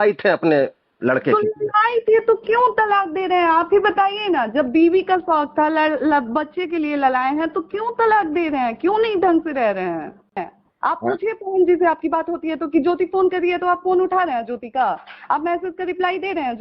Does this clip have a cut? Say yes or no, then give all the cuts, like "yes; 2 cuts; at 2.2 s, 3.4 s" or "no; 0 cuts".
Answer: yes; 1 cut; at 10.6 s